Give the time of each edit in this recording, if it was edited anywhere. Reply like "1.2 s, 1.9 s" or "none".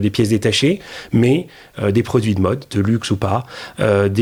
none